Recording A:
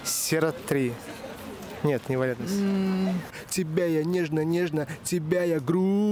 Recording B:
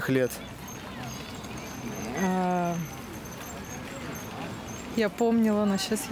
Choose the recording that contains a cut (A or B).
A